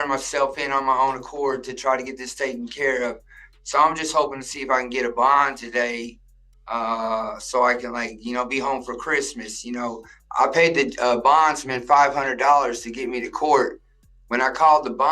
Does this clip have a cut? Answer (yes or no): yes